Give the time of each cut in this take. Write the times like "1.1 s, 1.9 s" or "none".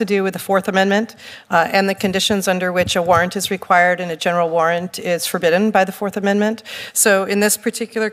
none